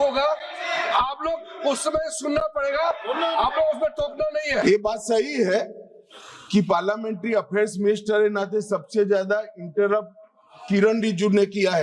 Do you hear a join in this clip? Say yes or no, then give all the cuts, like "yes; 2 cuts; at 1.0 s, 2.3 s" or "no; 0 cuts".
yes; 1 cut; at 4.6 s